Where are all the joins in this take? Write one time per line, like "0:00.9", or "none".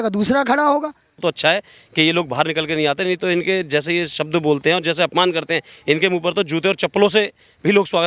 0:01.2